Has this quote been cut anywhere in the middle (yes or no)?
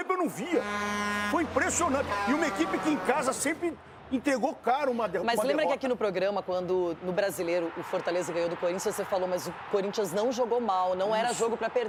no